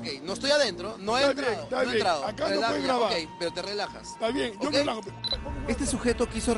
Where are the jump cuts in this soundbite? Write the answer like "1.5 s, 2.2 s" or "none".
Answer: none

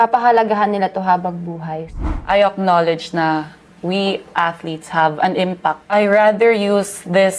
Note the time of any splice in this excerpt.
1.9 s, 5.8 s

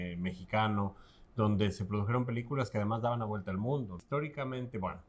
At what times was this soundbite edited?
4.0 s

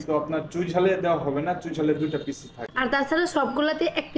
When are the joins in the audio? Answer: none

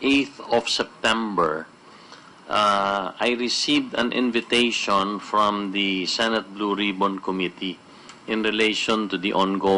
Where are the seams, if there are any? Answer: 7.3 s

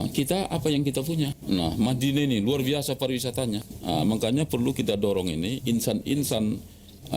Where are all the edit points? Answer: 1.3 s, 3.7 s

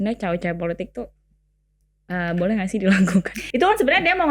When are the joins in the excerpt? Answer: 3.4 s

